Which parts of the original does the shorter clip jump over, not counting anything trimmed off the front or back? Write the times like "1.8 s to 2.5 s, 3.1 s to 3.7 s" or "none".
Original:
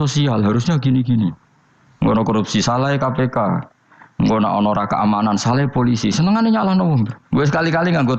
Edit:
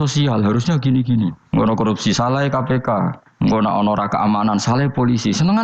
1.4 s to 1.9 s, 3.7 s to 4.0 s